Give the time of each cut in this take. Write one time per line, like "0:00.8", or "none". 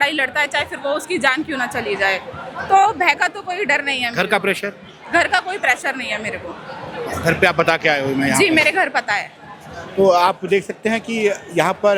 none